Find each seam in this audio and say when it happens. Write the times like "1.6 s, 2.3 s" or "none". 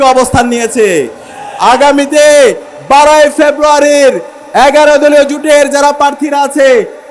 none